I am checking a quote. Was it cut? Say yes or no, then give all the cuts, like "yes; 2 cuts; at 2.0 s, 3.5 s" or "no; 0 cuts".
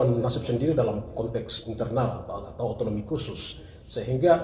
no; 0 cuts